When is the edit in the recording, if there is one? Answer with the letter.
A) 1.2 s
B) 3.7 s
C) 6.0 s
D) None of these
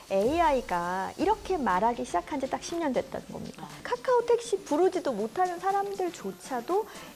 B